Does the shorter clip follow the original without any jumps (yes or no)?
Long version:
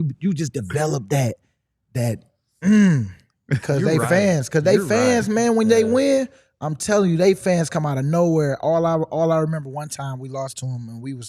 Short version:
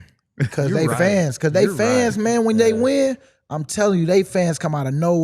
yes